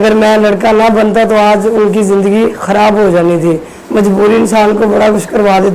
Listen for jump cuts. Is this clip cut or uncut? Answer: cut